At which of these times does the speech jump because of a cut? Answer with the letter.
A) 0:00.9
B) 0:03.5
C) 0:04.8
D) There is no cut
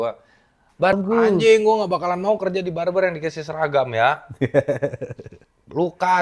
A